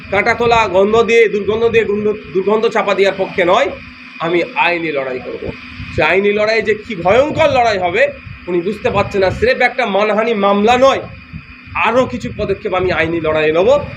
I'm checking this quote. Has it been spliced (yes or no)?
no